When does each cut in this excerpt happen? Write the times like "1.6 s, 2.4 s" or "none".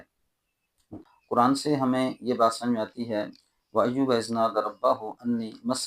0.9 s

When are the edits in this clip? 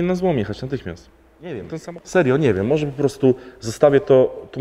1.7 s

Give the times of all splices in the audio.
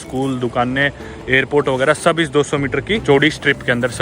3.0 s

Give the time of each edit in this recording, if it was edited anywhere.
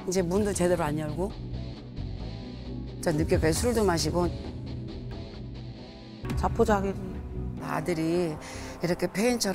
7.5 s

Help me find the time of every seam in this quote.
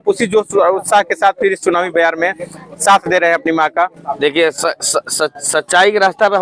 none

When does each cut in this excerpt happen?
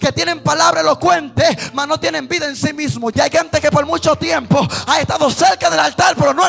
3.1 s

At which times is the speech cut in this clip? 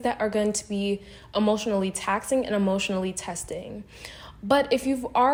none

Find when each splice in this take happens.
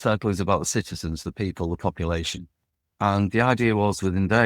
none

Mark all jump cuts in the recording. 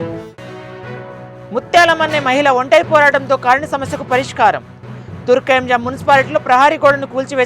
1.2 s

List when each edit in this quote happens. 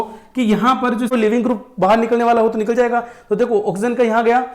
1.1 s

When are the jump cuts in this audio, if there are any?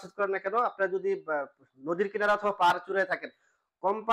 none

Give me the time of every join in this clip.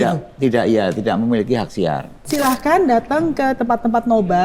2.2 s

